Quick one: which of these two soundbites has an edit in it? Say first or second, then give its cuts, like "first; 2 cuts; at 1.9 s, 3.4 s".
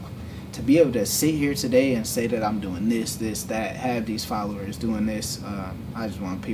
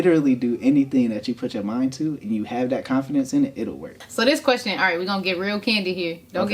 second; 1 cut; at 4.0 s